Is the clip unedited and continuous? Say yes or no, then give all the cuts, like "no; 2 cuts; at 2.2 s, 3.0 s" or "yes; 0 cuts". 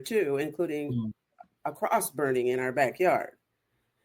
no; 1 cut; at 1.5 s